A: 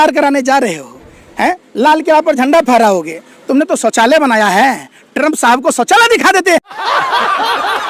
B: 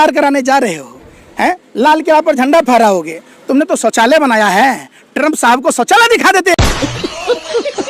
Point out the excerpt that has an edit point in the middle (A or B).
B